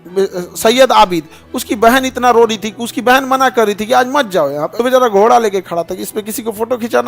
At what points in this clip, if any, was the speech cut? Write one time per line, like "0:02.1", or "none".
0:04.7